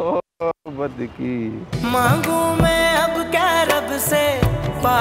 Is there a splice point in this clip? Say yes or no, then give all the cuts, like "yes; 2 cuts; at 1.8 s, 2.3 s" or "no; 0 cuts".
no; 0 cuts